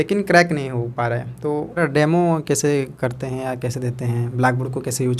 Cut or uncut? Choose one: cut